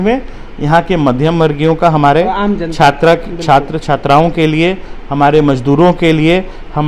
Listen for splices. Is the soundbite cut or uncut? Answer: uncut